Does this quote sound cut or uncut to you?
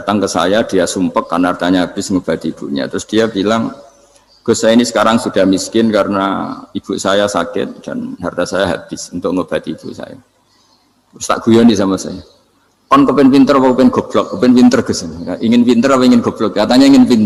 uncut